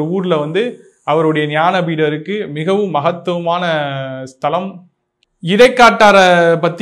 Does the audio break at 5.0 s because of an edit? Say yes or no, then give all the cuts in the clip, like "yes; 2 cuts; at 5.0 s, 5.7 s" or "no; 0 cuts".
no; 0 cuts